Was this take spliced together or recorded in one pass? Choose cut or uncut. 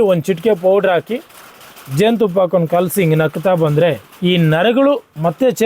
cut